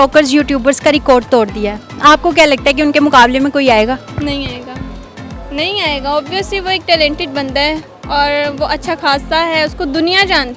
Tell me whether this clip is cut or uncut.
uncut